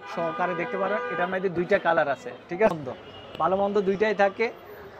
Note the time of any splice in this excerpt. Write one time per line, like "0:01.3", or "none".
0:02.7